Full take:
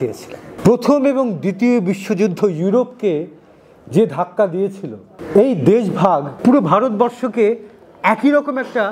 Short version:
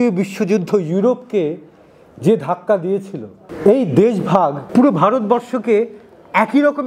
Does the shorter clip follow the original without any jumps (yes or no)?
yes